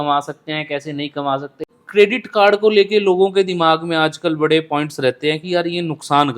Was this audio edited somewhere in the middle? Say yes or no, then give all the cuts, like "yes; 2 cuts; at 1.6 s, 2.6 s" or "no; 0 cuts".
yes; 1 cut; at 1.8 s